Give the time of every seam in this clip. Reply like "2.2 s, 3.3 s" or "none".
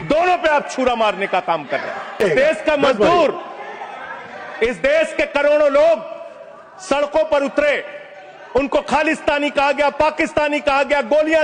2.2 s